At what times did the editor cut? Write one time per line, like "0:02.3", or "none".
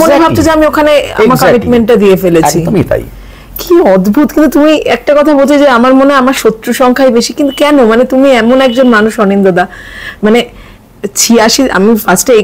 none